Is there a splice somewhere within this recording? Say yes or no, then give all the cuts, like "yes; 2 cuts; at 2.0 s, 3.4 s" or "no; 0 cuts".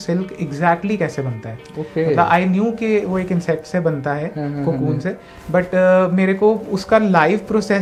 no; 0 cuts